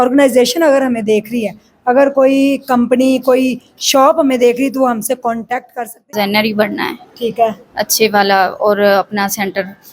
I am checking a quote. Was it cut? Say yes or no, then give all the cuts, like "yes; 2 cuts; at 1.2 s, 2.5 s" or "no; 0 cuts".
yes; 1 cut; at 5.9 s